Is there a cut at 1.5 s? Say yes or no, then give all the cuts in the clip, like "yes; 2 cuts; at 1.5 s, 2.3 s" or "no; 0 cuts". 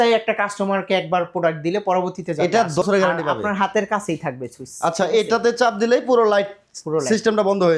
no; 1 cut; at 2.8 s